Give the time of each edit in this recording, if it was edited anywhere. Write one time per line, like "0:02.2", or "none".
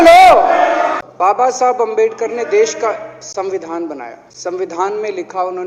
0:01.0
0:04.2